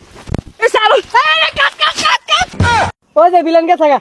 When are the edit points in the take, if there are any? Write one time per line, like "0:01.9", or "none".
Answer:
0:02.7